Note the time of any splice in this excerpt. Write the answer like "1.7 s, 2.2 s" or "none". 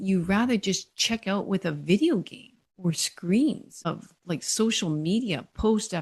3.7 s